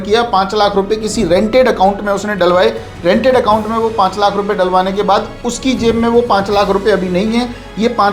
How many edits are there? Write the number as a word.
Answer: zero